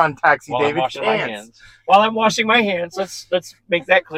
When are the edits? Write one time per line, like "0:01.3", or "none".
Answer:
none